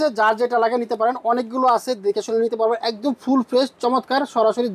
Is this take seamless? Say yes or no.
yes